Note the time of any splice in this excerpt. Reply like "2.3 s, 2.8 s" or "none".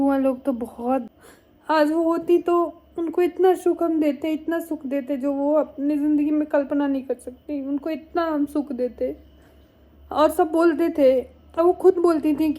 1.2 s